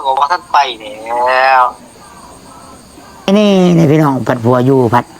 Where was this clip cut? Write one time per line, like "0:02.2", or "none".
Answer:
0:03.3